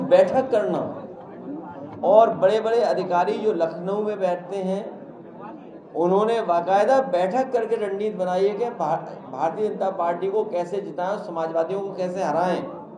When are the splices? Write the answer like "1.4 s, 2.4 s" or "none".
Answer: none